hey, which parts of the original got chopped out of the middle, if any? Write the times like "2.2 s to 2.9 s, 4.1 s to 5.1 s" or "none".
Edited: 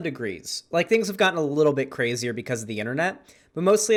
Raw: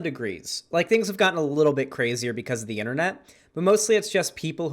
none